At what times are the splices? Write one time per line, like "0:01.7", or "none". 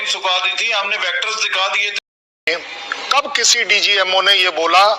0:02.5